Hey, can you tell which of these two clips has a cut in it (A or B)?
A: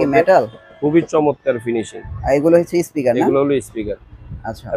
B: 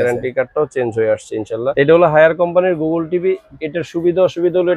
B